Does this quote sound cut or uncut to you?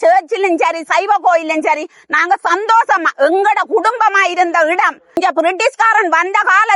cut